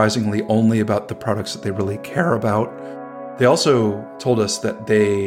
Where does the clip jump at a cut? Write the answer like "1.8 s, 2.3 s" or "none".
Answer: 2.8 s, 4.1 s